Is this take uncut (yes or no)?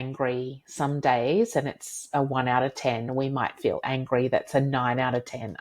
yes